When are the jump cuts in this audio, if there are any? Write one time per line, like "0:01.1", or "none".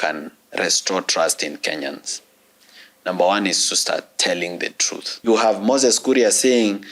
0:05.3